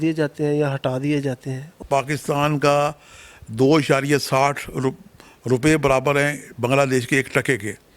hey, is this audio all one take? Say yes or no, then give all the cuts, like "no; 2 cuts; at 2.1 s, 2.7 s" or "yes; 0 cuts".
no; 1 cut; at 1.8 s